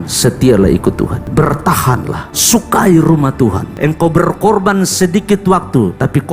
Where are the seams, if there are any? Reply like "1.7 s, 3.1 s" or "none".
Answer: 1.2 s, 2.3 s, 3.7 s